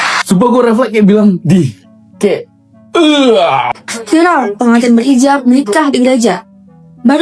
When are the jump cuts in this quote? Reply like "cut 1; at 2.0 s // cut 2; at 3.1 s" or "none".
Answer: cut 1; at 3.8 s